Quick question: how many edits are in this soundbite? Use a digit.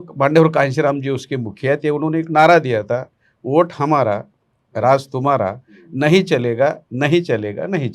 0